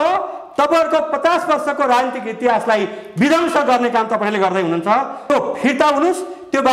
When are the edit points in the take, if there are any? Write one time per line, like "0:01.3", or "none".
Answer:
0:05.3